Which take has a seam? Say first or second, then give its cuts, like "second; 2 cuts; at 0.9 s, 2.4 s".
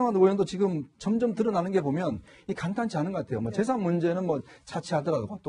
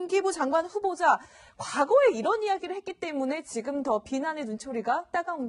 second; 1 cut; at 1.1 s